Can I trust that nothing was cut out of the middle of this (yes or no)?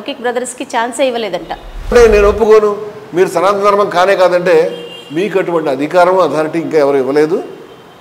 no